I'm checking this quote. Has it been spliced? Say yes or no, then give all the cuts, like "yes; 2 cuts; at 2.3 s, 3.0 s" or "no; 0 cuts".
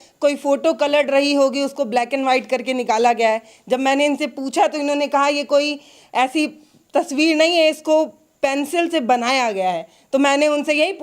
no; 0 cuts